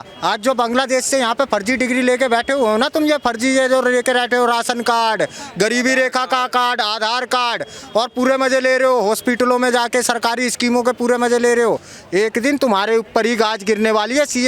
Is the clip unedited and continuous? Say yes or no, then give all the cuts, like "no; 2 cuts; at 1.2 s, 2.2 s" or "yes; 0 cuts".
yes; 0 cuts